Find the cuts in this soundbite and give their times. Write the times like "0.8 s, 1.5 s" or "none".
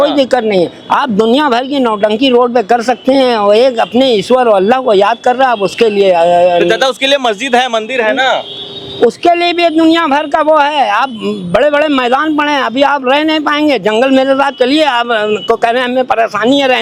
none